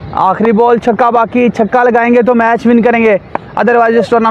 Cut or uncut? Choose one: uncut